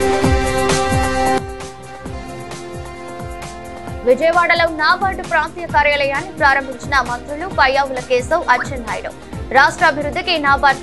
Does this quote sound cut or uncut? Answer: cut